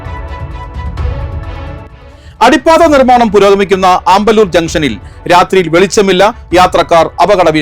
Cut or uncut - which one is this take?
cut